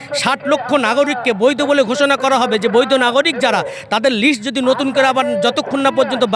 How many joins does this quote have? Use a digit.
0